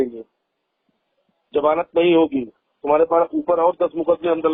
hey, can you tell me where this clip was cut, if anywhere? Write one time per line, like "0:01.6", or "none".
none